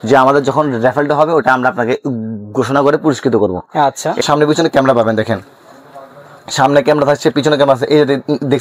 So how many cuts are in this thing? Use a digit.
1